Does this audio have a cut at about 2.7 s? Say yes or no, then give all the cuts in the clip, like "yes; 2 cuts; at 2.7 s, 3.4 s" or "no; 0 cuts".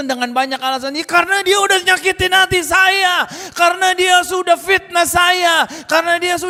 no; 0 cuts